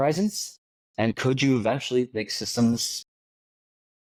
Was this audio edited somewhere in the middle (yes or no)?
no